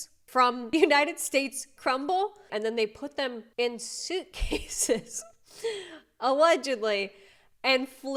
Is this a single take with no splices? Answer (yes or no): yes